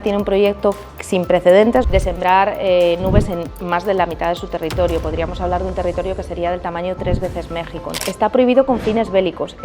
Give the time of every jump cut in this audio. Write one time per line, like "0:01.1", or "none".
0:01.9
0:08.0